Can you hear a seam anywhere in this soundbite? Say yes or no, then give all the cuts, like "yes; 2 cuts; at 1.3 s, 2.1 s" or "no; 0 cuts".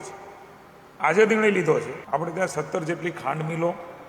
yes; 1 cut; at 2.0 s